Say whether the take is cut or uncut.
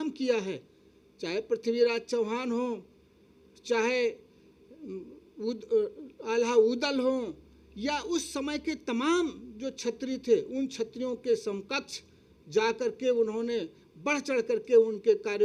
uncut